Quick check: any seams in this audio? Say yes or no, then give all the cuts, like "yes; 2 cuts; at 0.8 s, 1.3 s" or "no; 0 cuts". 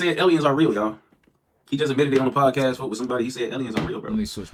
no; 0 cuts